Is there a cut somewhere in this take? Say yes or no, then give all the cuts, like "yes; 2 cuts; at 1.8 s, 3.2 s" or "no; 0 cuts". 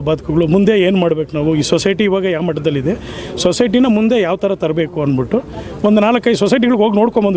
no; 0 cuts